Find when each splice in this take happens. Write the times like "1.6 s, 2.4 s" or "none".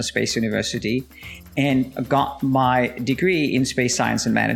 none